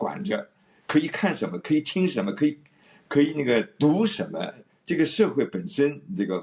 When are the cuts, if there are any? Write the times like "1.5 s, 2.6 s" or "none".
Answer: 4.7 s